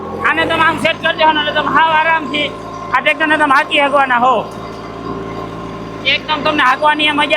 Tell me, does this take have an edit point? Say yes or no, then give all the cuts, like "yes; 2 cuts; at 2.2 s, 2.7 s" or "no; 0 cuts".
no; 0 cuts